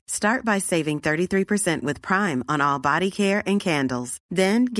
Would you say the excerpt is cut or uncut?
uncut